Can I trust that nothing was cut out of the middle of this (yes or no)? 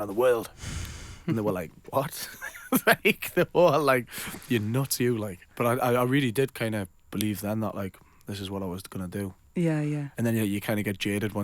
no